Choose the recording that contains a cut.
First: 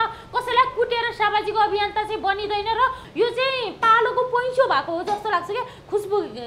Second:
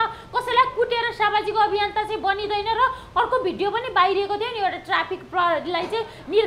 first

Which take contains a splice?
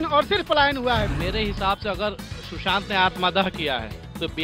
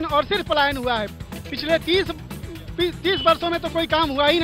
first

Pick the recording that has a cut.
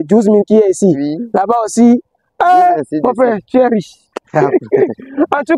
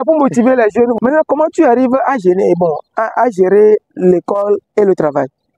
second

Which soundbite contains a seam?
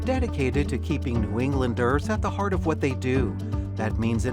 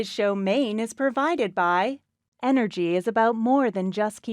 second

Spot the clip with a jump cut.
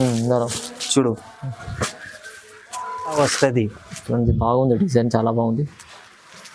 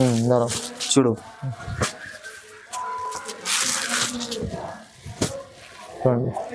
first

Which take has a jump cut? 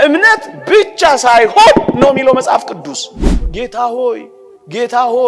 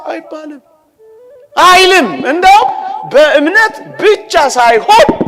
first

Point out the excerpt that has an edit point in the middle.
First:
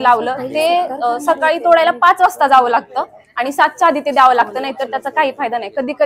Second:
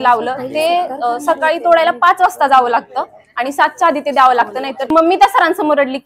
second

